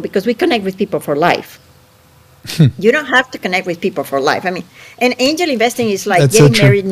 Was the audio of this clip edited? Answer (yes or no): no